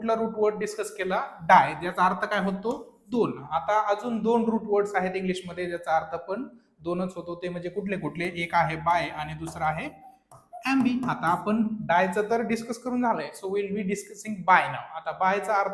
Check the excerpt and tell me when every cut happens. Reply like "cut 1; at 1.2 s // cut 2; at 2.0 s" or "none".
none